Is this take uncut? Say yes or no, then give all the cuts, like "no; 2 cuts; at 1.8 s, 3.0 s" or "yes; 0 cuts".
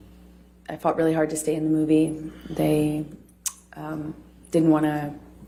yes; 0 cuts